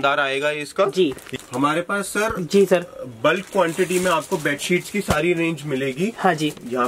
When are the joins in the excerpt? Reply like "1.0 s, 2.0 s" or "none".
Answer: 1.3 s